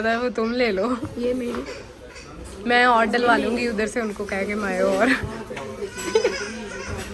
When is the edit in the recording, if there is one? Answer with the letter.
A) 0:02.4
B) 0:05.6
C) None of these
C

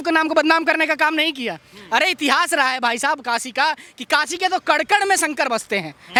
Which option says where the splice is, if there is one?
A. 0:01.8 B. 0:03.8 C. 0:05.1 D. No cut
D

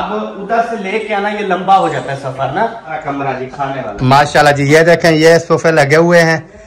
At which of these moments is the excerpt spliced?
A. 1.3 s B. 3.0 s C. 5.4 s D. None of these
B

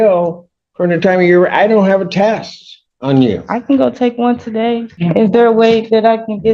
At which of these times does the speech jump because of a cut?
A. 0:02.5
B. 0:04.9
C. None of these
B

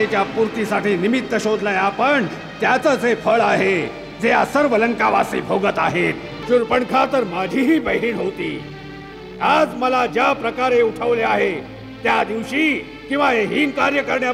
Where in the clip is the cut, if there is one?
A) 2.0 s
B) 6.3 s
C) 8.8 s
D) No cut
B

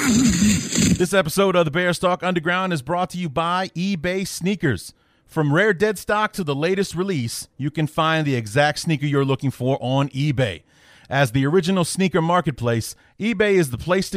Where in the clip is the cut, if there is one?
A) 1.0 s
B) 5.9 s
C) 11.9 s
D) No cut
A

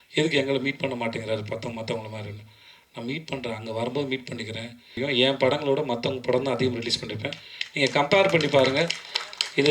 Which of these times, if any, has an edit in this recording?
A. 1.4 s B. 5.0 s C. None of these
B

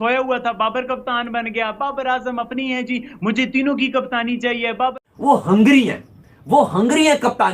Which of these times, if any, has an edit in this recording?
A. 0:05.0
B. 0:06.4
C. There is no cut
A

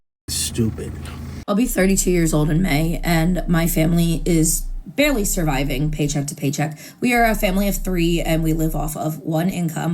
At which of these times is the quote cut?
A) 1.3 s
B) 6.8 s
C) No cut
A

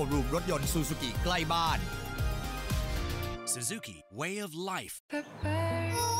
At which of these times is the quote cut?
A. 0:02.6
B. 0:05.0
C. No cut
B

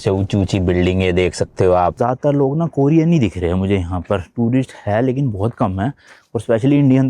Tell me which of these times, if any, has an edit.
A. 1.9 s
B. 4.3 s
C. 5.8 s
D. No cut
A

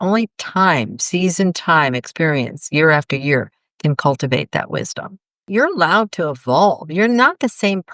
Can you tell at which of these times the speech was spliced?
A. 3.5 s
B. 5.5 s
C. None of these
B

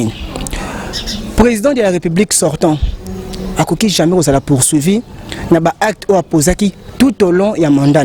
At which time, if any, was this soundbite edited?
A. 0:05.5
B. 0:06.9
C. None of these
C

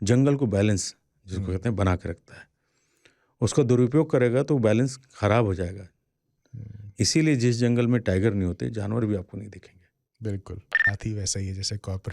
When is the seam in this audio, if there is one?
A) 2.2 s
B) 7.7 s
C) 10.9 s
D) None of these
C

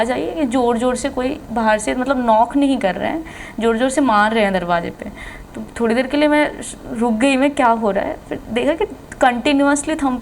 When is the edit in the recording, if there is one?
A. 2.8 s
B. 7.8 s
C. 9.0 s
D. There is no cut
D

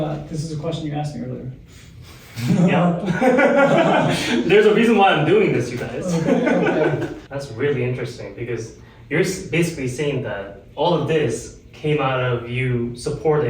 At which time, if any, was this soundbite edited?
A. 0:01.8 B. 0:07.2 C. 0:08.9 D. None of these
B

